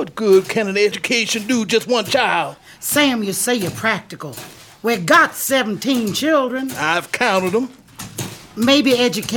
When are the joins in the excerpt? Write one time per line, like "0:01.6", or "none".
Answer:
0:01.0
0:02.6